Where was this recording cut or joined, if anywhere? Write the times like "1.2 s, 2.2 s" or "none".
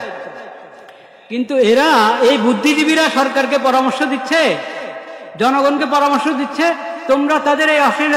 none